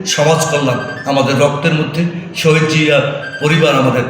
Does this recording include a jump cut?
no; 0 cuts

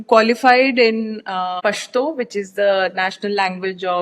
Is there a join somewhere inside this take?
yes; 1 cut; at 1.6 s

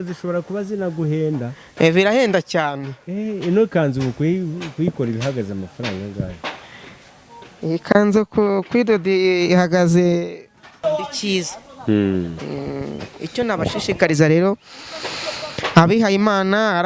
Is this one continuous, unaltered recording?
no; 1 cut; at 10.7 s

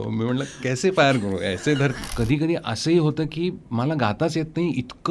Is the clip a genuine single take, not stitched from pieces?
no; 1 cut; at 2.1 s

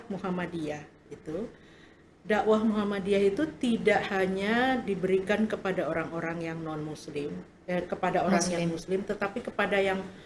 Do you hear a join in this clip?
no; 0 cuts

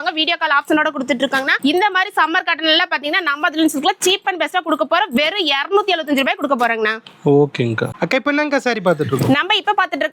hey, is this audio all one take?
yes; 0 cuts

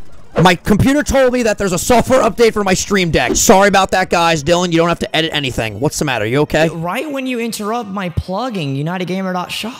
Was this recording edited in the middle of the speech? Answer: yes; 1 cut; at 3.3 s

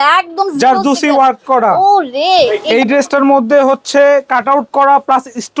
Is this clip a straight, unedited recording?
no; 1 cut; at 2.6 s

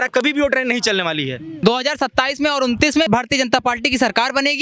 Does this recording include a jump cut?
yes; 2 cuts; at 1.6 s, 3.1 s

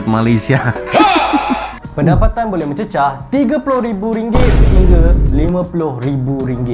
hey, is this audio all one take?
no; 1 cut; at 1.8 s

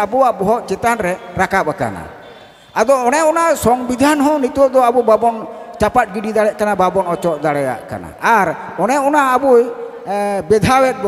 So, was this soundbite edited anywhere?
no; 0 cuts

